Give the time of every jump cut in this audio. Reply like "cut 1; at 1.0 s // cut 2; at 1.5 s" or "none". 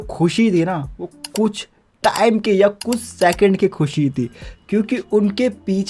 none